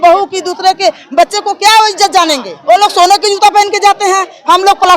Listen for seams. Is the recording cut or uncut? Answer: cut